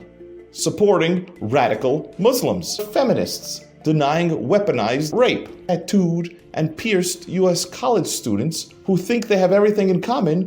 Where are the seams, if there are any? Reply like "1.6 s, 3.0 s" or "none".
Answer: 2.9 s, 5.5 s